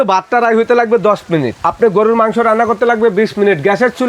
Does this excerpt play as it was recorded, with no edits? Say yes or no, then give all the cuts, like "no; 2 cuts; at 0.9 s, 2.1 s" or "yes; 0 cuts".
no; 1 cut; at 1.5 s